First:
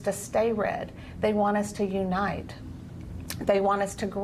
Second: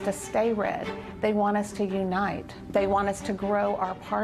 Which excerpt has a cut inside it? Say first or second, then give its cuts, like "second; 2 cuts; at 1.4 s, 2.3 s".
second; 1 cut; at 2.5 s